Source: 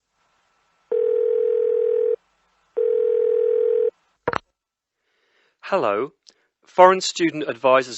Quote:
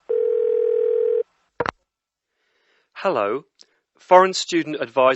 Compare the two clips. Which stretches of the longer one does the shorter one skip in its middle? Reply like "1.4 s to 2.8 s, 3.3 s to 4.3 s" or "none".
1.9 s to 3.7 s